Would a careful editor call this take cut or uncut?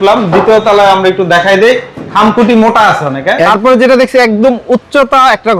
cut